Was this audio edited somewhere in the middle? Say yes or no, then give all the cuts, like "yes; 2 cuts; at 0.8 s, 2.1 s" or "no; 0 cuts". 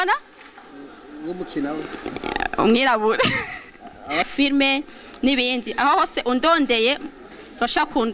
yes; 1 cut; at 4.3 s